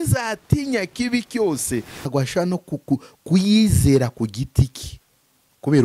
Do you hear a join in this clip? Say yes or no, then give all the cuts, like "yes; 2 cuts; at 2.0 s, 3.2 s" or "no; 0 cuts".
yes; 1 cut; at 2.0 s